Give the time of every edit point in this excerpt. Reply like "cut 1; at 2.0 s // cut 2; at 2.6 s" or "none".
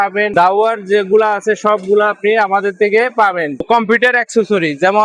cut 1; at 3.5 s